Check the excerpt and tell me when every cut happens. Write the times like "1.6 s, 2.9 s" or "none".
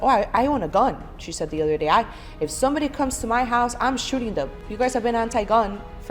4.6 s